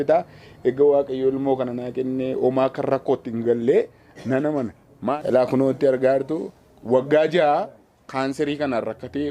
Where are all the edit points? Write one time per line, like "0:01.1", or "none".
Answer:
0:05.1